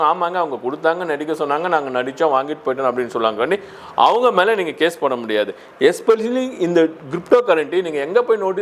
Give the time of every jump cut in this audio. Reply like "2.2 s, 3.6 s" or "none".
none